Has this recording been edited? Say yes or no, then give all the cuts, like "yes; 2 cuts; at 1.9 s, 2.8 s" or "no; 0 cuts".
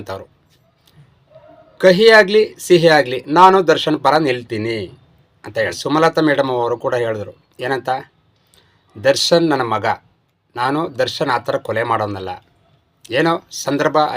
yes; 1 cut; at 5.8 s